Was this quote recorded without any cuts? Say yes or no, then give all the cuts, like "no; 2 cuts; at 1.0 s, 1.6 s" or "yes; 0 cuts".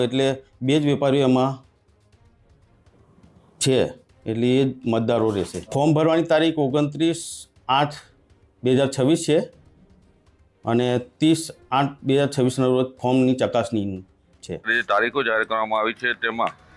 no; 2 cuts; at 5.6 s, 14.8 s